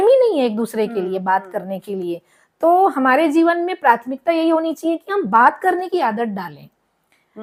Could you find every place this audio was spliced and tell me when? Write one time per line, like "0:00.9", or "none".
none